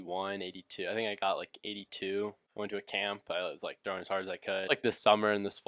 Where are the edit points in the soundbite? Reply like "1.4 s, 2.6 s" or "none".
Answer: 2.4 s, 4.7 s

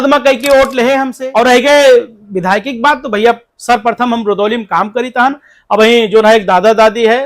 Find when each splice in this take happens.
1.1 s

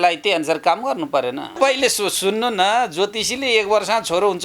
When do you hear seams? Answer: 1.6 s

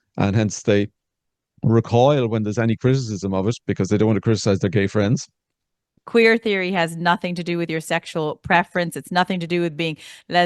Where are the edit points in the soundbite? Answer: 5.9 s

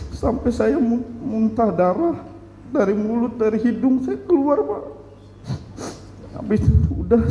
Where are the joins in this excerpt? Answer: none

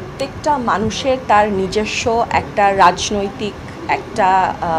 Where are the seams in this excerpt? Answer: none

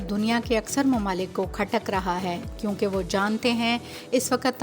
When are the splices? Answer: none

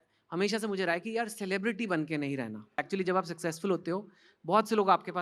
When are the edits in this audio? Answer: 2.8 s

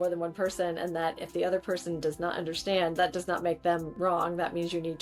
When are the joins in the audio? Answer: 3.9 s

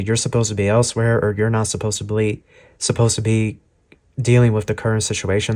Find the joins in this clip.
none

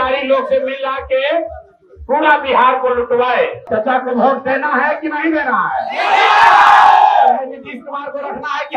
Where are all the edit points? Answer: 3.6 s

